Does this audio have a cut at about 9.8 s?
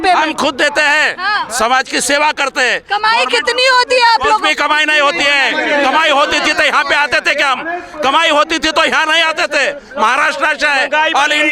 no; 0 cuts

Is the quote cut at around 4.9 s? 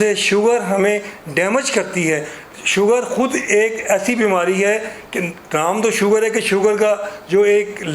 no; 0 cuts

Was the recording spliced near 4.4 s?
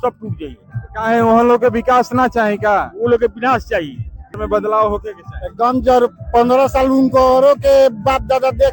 yes; 1 cut; at 4.4 s

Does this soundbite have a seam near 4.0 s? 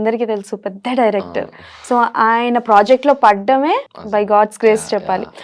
yes; 1 cut; at 4.0 s

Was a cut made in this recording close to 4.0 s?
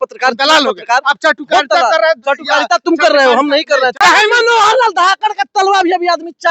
yes; 1 cut; at 4.0 s

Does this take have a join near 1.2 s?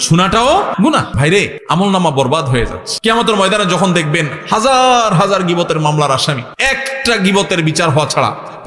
yes; 3 cuts; at 1.2 s, 2.8 s, 6.5 s

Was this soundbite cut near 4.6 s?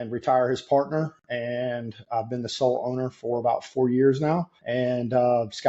yes; 1 cut; at 4.6 s

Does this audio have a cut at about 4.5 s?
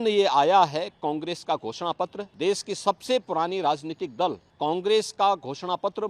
yes; 2 cuts; at 2.2 s, 4.5 s

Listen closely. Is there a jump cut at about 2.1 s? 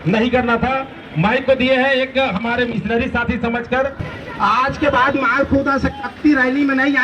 no; 1 cut; at 4.0 s

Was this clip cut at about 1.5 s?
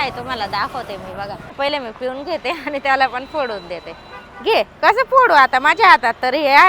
yes; 1 cut; at 1.5 s

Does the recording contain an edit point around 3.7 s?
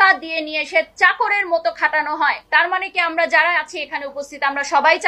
no; 1 cut; at 2.4 s

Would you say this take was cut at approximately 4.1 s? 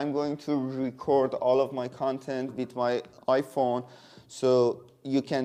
no; 0 cuts

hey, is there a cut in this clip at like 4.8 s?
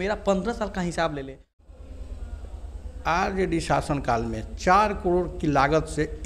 no; 1 cut; at 1.6 s

